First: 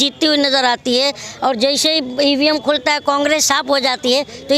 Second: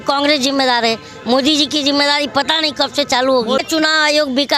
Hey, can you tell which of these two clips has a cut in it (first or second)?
second